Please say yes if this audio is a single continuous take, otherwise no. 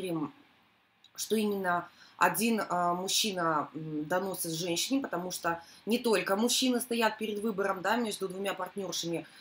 no